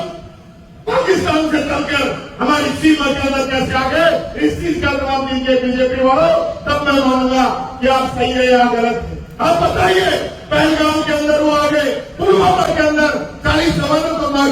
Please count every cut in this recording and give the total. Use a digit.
0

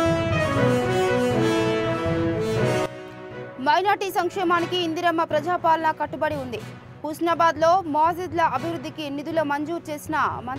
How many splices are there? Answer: 1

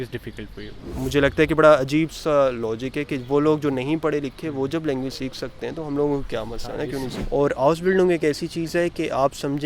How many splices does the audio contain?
2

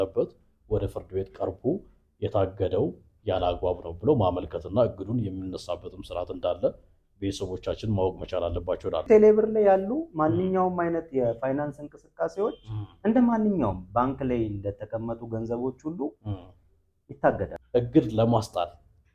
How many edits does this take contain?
2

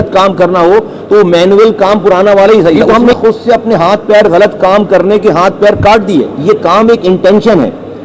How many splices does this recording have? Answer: 2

